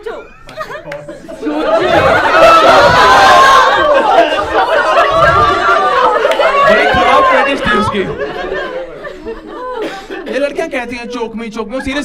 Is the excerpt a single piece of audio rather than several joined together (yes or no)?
yes